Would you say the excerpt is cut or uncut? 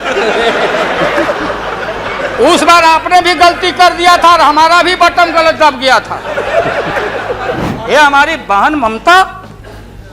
cut